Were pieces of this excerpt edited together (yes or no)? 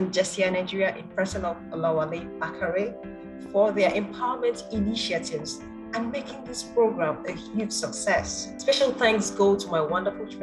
yes